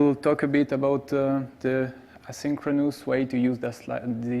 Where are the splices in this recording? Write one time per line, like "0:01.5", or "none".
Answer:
0:03.3

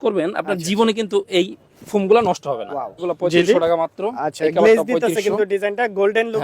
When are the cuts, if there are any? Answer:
0:03.0

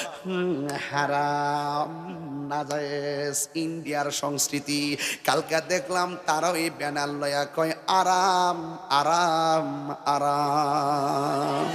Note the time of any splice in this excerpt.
none

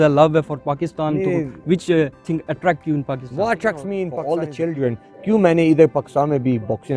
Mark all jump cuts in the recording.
0:04.1

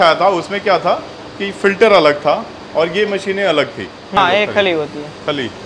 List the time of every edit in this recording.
0:04.2

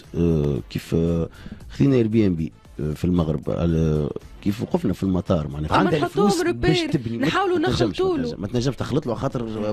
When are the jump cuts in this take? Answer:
0:05.7

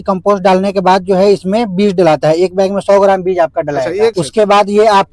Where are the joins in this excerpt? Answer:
0:04.2

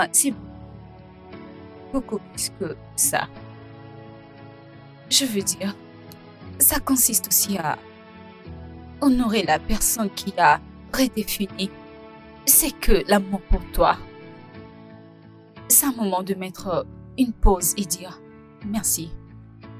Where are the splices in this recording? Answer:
none

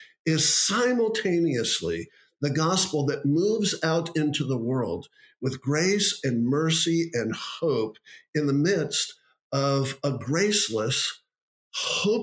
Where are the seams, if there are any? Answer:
none

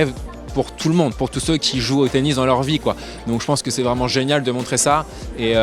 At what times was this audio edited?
none

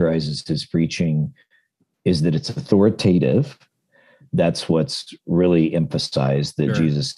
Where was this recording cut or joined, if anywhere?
0:04.2

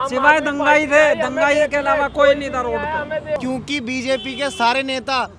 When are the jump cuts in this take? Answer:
0:03.4

